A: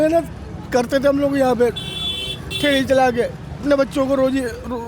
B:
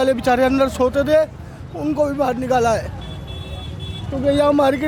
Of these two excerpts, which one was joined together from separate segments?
A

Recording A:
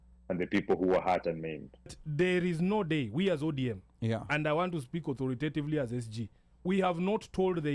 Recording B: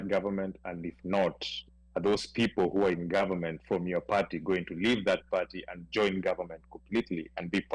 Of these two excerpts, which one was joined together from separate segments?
A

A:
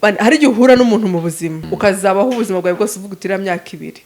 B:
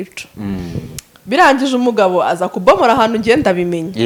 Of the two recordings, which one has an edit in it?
A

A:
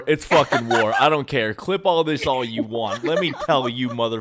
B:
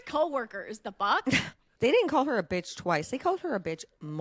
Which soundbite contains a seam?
B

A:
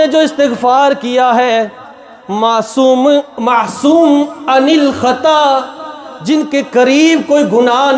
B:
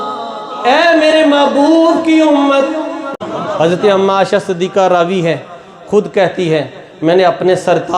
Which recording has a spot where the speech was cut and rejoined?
B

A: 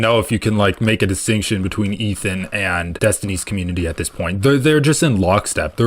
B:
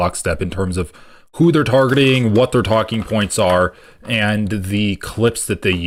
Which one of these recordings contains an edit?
A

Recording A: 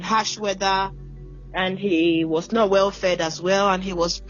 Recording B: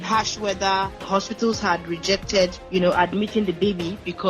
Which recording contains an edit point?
B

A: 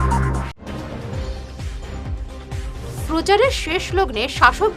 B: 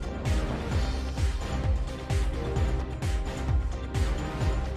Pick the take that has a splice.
A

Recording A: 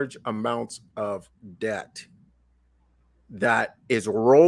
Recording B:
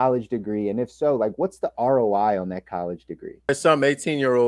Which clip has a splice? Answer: B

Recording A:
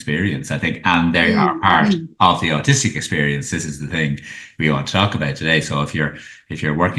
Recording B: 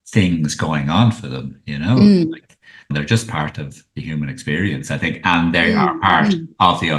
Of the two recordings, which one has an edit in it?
B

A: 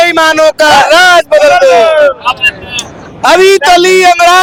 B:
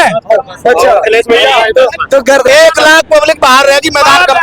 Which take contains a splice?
B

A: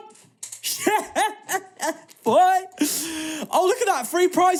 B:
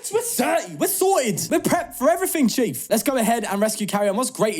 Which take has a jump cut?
B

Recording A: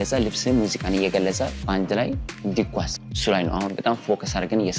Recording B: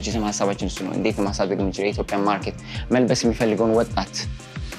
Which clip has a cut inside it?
A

